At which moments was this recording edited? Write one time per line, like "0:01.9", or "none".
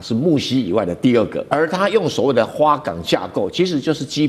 0:01.4